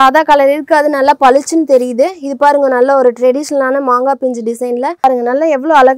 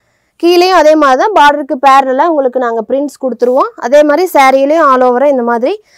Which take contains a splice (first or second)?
first